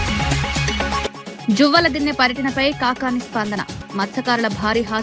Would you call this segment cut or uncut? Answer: uncut